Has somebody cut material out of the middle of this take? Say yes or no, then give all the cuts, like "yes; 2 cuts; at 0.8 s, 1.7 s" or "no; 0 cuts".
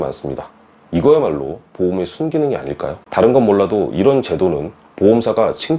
yes; 1 cut; at 3.0 s